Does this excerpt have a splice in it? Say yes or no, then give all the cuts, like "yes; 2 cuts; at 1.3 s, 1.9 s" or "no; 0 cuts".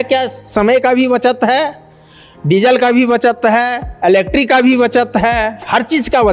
no; 0 cuts